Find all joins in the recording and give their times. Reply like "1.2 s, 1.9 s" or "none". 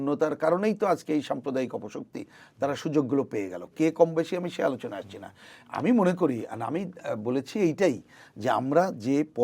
none